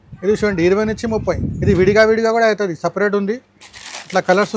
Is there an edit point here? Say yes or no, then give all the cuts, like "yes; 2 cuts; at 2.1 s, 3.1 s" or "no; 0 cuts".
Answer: no; 0 cuts